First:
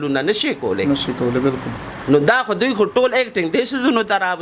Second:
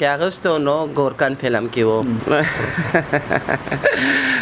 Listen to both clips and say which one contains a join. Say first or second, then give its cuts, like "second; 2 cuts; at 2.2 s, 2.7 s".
second; 1 cut; at 2.2 s